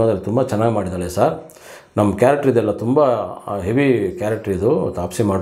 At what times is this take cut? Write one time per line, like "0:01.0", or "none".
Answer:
none